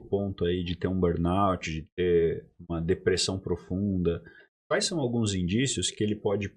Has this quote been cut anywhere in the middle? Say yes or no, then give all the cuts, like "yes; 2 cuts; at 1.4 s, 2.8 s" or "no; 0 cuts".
no; 0 cuts